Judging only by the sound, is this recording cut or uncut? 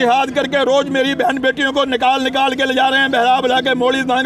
uncut